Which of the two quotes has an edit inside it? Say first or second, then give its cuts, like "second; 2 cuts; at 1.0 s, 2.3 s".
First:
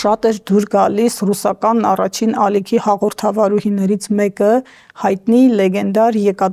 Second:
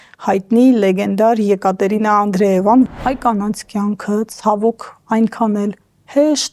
second; 1 cut; at 2.9 s